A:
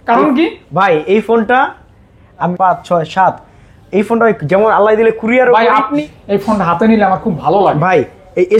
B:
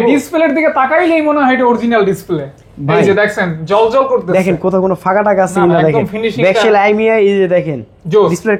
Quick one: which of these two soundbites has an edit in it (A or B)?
A